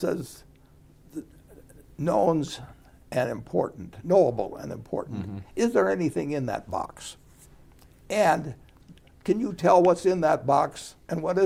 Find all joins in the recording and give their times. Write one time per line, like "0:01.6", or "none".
none